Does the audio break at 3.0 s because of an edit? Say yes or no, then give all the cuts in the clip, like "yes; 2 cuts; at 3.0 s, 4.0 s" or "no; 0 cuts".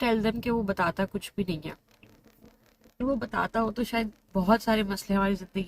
yes; 1 cut; at 3.0 s